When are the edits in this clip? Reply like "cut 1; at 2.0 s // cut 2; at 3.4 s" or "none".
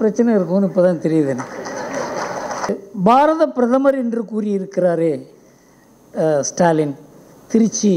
cut 1; at 2.8 s